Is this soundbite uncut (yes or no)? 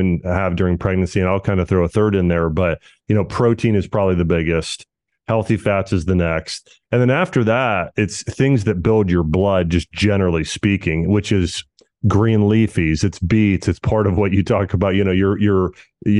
yes